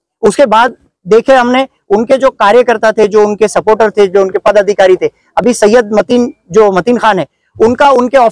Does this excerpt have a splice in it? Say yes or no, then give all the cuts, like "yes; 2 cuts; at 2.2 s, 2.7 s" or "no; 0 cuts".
no; 0 cuts